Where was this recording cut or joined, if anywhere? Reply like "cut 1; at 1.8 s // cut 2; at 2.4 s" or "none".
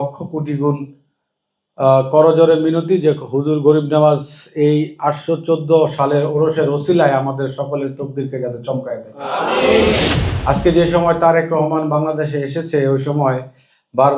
cut 1; at 10.1 s